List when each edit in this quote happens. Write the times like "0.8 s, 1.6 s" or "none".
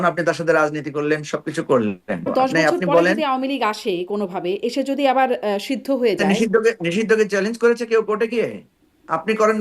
2.3 s, 6.2 s